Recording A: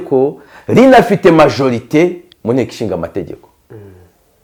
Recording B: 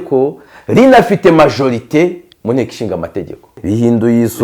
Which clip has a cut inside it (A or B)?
B